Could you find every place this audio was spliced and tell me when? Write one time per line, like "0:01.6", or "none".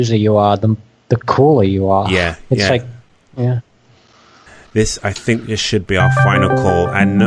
none